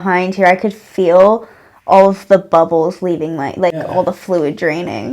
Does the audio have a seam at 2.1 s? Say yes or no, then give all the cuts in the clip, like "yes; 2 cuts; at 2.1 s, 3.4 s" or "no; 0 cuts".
no; 1 cut; at 3.7 s